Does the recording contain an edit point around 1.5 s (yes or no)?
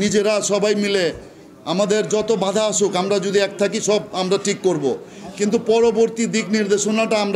no